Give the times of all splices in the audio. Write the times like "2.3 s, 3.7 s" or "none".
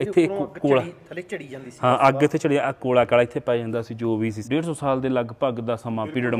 4.4 s